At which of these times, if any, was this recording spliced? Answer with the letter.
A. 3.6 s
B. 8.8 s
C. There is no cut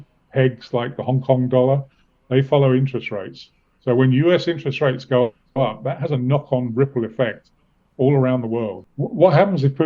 B